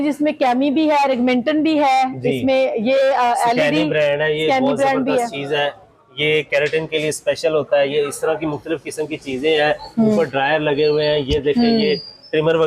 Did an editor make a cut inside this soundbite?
no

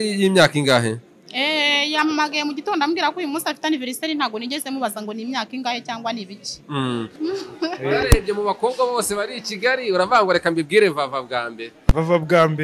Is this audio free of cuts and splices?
no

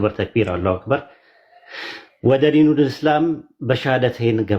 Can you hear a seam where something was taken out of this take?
no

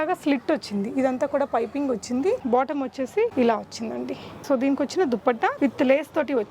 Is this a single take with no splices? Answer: no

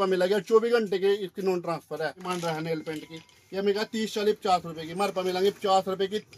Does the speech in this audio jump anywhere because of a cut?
yes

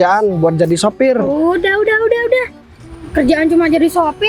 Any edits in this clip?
no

